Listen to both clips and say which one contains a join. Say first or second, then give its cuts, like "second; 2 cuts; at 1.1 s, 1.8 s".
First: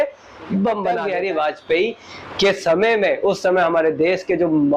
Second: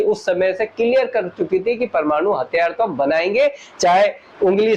first; 1 cut; at 1.0 s